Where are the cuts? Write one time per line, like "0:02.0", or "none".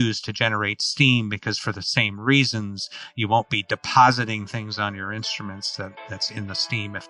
none